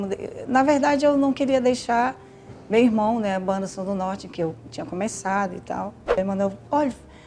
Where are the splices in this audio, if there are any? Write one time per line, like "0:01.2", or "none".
0:06.2